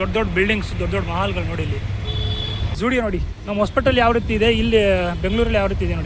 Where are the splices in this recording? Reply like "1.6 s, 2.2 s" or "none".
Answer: 2.8 s

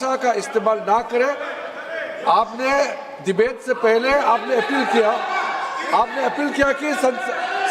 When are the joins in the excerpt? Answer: none

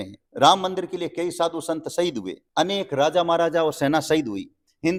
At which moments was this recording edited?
none

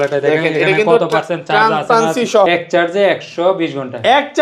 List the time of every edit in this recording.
2.5 s

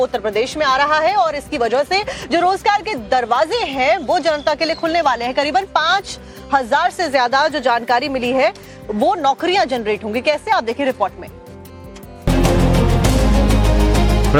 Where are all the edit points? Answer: none

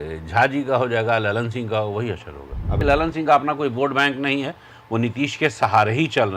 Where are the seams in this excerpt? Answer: 2.7 s

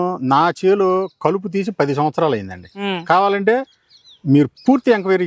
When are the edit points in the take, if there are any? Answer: 2.8 s

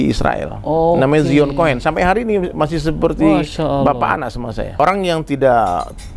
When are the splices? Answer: 4.8 s

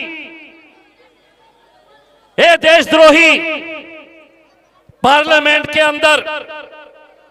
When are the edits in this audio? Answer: none

